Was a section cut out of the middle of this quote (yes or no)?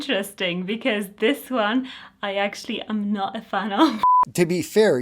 yes